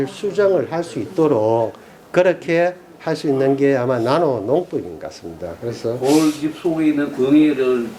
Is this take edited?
no; 0 cuts

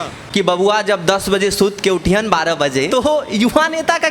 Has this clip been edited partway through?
yes; 1 cut; at 2.9 s

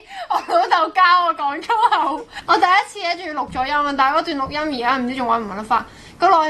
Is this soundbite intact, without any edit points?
no; 1 cut; at 2.3 s

